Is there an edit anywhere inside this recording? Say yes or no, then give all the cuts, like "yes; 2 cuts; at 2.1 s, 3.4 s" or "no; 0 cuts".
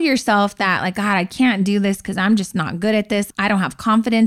no; 0 cuts